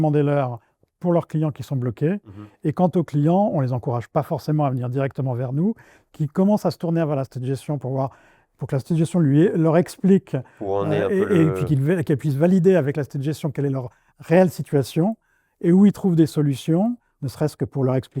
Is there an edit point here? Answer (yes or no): no